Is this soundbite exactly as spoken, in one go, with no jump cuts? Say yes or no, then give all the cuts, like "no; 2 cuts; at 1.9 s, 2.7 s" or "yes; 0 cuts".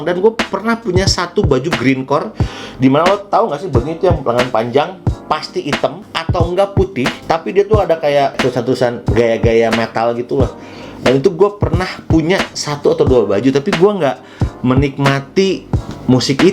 yes; 0 cuts